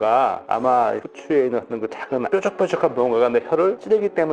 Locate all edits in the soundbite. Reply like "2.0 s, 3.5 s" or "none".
none